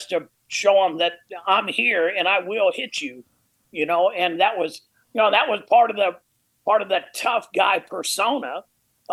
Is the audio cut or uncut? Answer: uncut